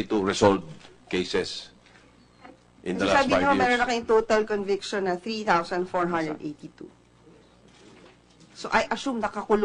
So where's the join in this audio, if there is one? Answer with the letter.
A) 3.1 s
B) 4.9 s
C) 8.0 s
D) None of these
D